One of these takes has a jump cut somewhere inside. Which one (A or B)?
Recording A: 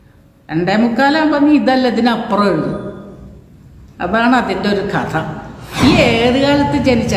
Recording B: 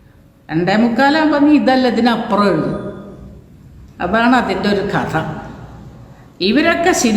A